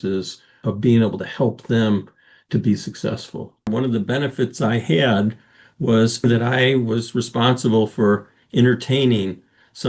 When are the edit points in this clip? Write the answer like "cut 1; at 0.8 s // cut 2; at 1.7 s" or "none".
cut 1; at 3.7 s // cut 2; at 6.2 s

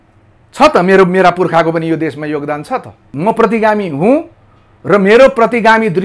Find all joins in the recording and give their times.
cut 1; at 3.1 s

